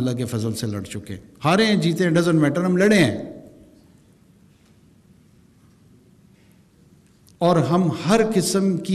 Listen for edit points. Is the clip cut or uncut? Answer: uncut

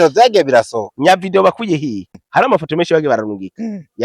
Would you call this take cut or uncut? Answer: cut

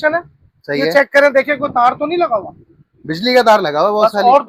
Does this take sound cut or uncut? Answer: uncut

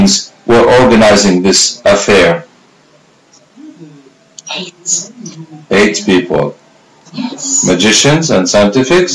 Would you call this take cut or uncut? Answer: uncut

